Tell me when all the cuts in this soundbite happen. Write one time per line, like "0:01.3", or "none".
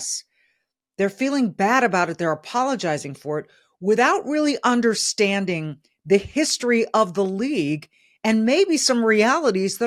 none